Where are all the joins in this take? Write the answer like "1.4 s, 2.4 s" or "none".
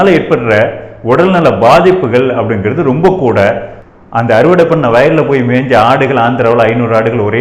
3.7 s